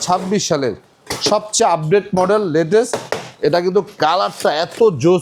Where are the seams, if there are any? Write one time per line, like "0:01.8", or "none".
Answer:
none